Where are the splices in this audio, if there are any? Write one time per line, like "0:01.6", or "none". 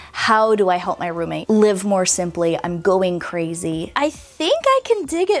0:01.4
0:03.9